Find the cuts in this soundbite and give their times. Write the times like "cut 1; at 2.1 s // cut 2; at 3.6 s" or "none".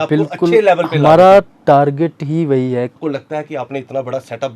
cut 1; at 3.0 s